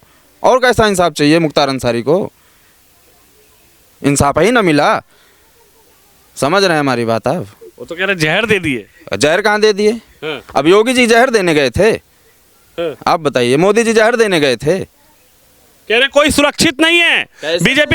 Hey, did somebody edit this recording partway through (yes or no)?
no